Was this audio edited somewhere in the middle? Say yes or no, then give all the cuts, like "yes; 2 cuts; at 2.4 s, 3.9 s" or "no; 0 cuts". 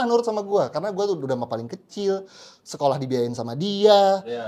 no; 0 cuts